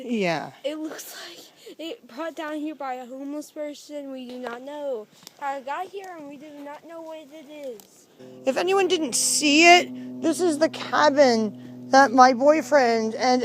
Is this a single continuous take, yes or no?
no